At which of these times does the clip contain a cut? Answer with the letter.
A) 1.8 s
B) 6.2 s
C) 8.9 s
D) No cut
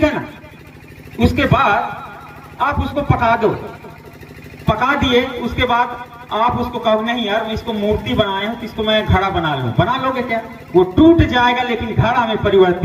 D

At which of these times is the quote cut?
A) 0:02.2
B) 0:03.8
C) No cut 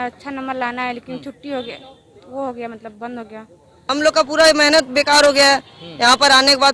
B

